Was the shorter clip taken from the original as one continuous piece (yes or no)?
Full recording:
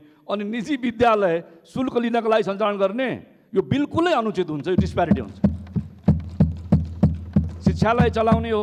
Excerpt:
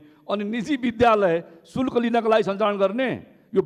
yes